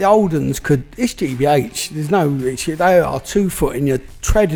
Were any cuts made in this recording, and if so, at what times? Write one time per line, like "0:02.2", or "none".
none